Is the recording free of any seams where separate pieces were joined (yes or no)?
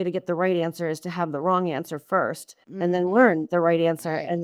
yes